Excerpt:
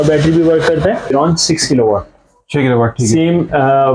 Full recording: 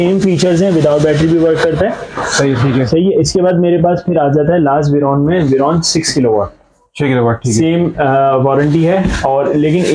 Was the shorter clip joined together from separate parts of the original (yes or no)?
yes